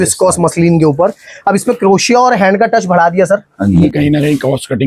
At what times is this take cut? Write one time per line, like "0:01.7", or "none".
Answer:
0:03.8

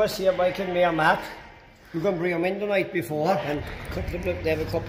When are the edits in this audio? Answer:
0:03.4

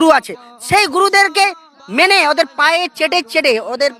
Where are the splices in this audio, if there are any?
none

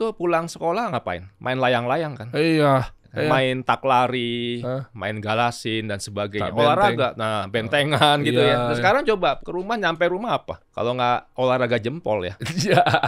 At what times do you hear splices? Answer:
0:03.0
0:09.4
0:10.6

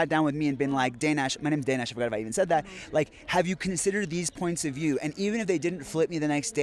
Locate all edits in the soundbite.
none

